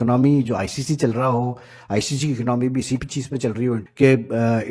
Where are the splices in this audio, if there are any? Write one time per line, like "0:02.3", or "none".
0:03.6